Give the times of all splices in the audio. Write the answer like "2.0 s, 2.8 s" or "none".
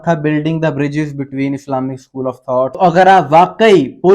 2.7 s